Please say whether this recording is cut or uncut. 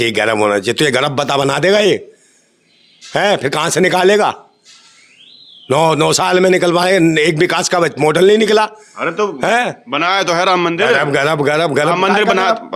uncut